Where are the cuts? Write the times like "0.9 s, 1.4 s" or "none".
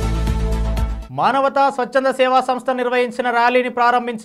0.9 s

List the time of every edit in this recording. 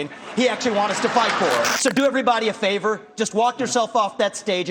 1.7 s

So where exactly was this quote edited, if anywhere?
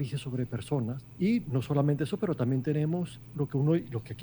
1.0 s, 3.2 s

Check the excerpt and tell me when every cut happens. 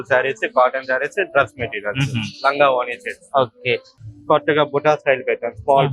3.9 s

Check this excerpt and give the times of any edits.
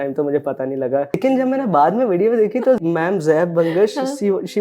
1.2 s, 2.8 s

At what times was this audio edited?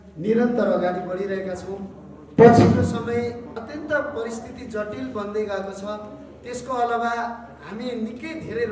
3.6 s

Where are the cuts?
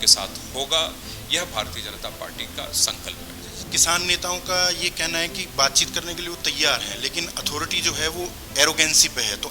3.6 s

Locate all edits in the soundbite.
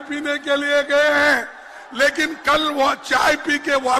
none

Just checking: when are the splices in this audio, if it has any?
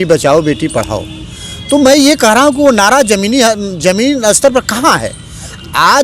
none

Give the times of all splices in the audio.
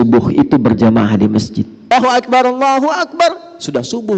1.8 s

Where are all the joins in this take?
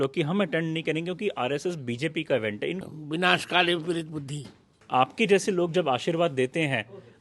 2.8 s, 4.8 s

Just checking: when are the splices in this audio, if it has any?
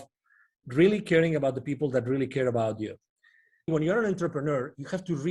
3.7 s

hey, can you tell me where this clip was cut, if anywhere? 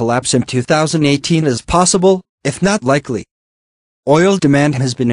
1.2 s

